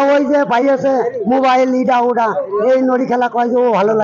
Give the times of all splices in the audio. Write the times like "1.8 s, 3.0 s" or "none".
none